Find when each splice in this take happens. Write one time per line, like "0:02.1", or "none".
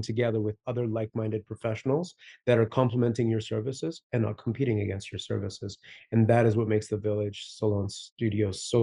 none